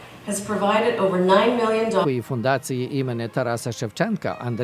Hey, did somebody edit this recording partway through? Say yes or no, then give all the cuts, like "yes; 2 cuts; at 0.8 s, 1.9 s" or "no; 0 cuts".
no; 0 cuts